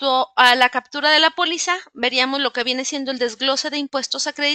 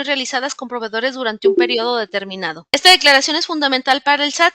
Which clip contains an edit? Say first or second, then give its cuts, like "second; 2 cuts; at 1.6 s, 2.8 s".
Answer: second; 1 cut; at 2.5 s